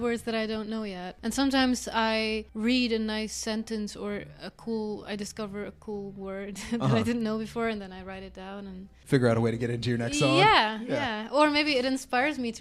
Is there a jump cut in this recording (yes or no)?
yes